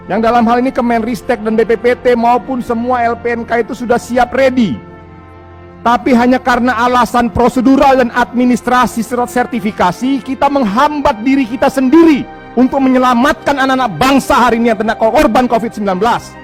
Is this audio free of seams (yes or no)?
yes